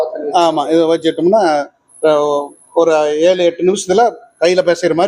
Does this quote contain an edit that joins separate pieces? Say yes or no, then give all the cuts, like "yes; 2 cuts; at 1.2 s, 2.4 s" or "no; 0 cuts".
no; 0 cuts